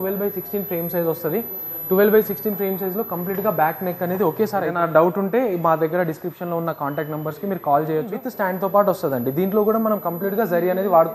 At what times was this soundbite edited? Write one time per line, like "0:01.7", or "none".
0:04.7
0:08.2